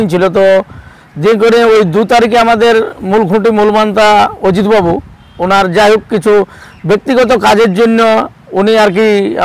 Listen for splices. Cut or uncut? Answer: uncut